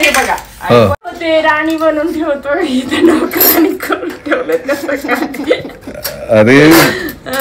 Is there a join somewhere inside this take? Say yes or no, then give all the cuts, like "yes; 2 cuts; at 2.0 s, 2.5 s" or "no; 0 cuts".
yes; 1 cut; at 1.0 s